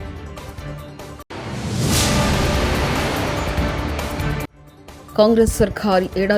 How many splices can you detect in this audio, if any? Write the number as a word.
zero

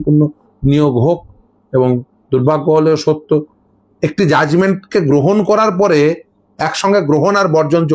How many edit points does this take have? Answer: one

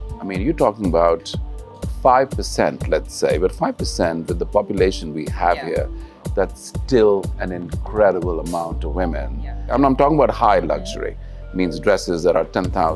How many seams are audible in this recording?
one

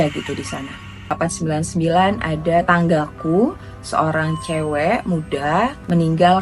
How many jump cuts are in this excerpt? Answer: one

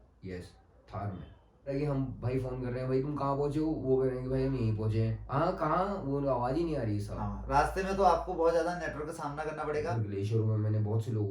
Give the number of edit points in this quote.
two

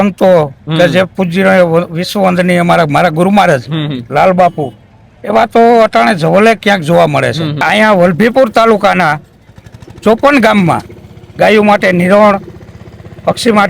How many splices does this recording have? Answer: one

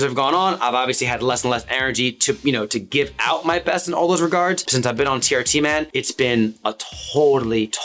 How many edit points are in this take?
zero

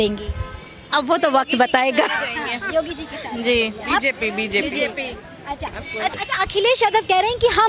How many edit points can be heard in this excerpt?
one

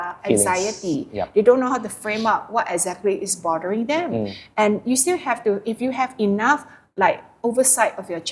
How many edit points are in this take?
zero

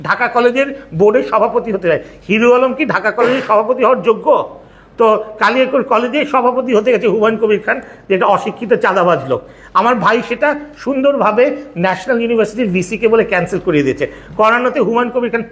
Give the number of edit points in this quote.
zero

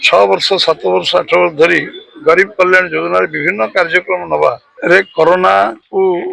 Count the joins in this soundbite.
one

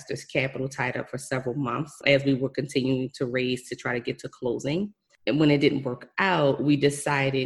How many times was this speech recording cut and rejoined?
two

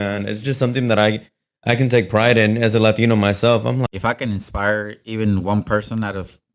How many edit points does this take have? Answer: one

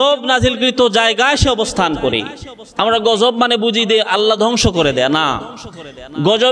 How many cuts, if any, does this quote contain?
zero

